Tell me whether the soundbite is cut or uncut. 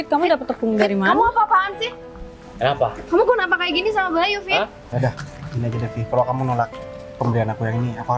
cut